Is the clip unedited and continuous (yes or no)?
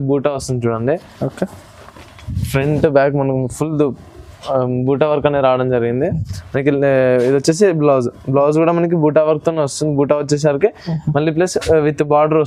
yes